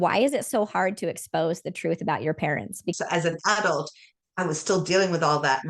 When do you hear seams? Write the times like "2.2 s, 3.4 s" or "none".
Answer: 2.9 s